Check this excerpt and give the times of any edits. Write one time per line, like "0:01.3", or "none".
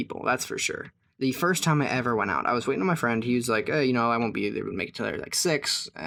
none